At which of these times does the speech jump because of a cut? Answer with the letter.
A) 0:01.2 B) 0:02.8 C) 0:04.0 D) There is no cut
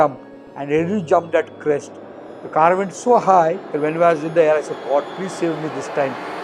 D